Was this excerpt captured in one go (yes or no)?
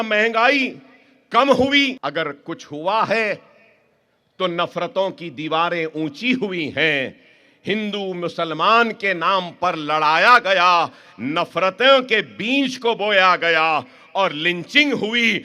no